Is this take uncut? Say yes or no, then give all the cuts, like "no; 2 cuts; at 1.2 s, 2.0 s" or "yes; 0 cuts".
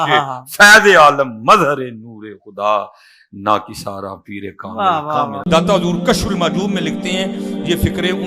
no; 1 cut; at 5.4 s